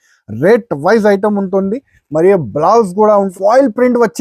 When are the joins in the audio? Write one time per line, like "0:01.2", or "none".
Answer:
0:03.3